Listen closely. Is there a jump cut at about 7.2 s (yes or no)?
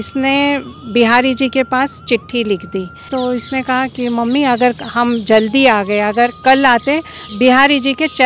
yes